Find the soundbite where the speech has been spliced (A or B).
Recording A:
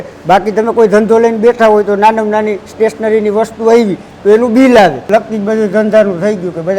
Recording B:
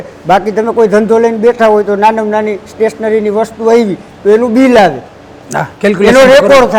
A